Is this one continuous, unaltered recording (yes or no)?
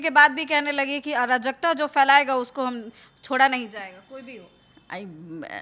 yes